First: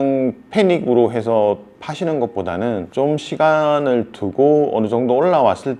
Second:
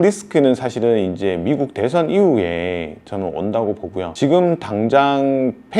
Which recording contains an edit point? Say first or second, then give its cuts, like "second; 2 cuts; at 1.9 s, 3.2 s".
second; 1 cut; at 4.1 s